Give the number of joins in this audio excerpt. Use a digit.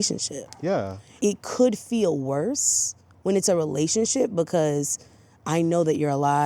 1